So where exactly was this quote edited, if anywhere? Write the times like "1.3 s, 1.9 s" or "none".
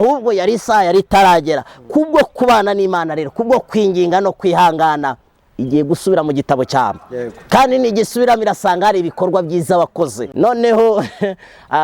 10.2 s